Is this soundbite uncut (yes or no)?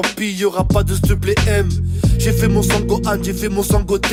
yes